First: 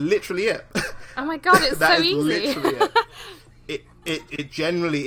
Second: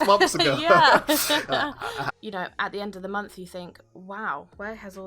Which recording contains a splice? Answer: second; 1 cut; at 2.1 s

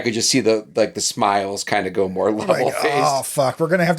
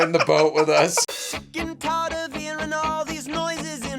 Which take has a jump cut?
second; 1 cut; at 1.0 s

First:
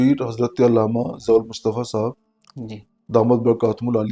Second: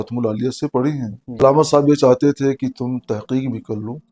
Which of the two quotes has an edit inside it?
second; 1 cut; at 1.4 s

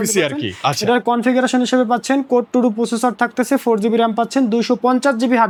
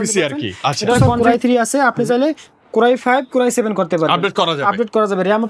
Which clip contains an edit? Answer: second; 1 cut; at 1.2 s

